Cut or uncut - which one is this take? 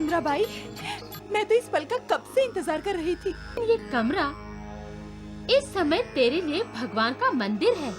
cut